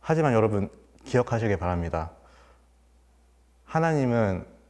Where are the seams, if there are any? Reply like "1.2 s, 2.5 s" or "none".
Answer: none